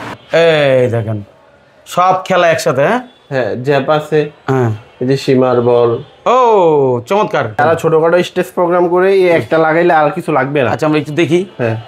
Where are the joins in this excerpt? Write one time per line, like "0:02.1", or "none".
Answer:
0:07.6